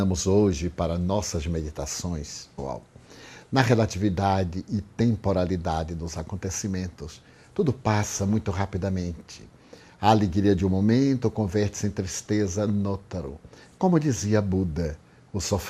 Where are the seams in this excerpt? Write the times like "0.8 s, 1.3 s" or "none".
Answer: none